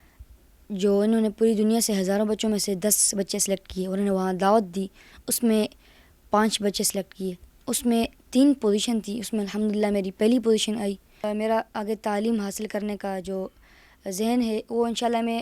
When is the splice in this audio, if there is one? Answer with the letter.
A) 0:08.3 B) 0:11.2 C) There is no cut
B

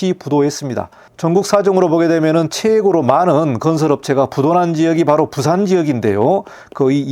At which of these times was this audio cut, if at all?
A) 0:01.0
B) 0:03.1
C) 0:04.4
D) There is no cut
D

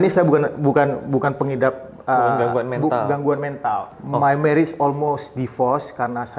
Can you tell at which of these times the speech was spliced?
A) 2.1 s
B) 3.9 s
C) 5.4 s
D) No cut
B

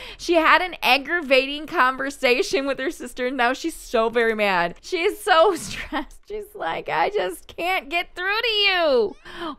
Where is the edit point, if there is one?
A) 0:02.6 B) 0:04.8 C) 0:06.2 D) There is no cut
B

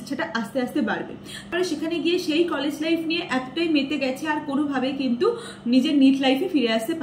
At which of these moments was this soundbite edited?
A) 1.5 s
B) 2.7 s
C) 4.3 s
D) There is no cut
A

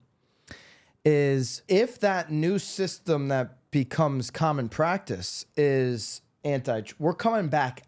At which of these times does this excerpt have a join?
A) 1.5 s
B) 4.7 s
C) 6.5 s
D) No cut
A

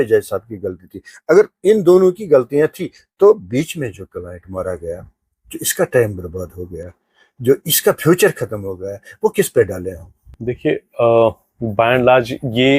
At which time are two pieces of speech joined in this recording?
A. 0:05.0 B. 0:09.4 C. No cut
C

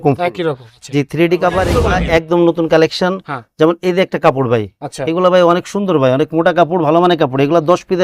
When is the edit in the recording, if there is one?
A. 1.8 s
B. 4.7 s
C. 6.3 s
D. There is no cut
A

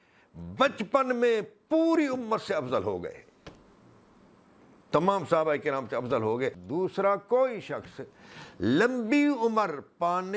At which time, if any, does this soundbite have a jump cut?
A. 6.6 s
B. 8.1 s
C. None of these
A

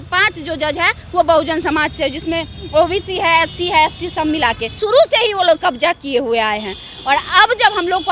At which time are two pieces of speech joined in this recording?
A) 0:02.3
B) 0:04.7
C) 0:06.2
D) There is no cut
B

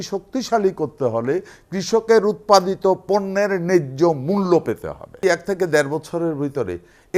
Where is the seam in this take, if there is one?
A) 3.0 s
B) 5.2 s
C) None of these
B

